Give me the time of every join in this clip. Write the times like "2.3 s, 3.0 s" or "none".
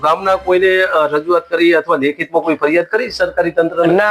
none